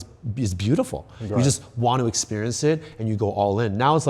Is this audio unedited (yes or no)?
yes